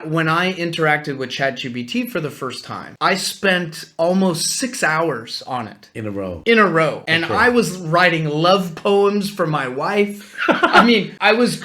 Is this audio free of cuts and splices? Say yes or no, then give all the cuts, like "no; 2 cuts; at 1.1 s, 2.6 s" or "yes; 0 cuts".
yes; 0 cuts